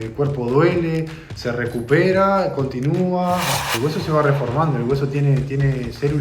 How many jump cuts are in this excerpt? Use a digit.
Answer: 1